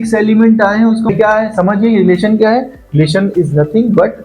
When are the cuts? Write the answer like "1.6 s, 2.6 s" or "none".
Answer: 1.1 s